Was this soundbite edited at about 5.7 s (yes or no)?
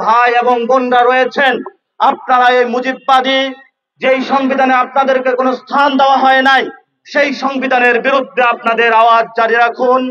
no